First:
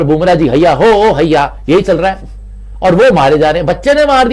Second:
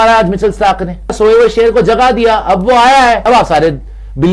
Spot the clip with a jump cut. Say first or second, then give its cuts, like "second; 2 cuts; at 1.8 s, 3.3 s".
second; 2 cuts; at 1.1 s, 3.2 s